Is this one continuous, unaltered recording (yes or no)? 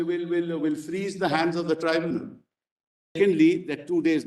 no